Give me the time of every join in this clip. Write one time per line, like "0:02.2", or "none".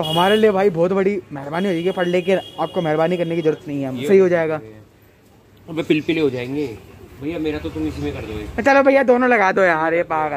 0:04.1